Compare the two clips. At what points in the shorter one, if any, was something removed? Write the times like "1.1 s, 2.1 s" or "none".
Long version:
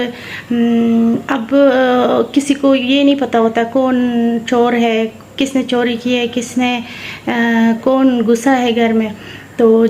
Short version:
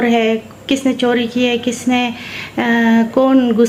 none